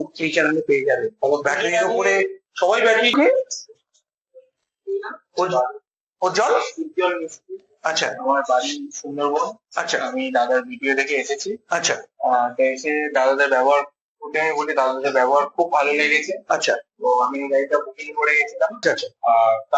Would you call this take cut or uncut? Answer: cut